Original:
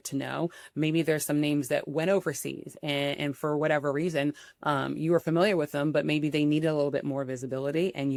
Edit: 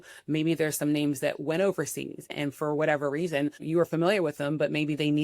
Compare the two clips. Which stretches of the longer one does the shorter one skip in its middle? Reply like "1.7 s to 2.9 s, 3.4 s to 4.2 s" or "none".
2.8 s to 3.1 s, 4.4 s to 4.9 s